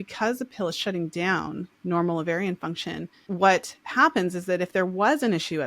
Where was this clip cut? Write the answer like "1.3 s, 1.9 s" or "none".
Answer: 3.1 s